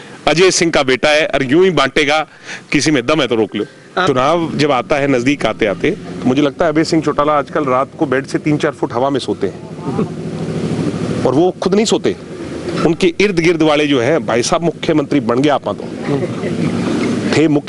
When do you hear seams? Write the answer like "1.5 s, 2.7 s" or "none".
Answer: 4.0 s